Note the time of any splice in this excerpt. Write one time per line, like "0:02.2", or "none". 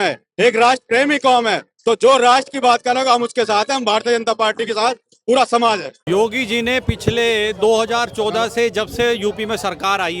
0:05.9